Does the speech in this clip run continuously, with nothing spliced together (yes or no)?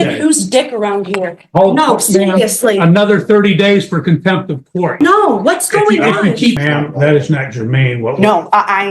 no